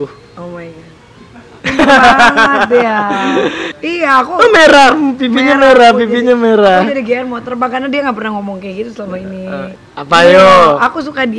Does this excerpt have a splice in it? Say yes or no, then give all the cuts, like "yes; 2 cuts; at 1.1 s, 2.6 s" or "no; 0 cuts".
no; 0 cuts